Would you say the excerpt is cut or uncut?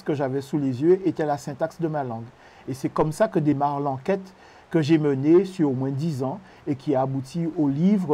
cut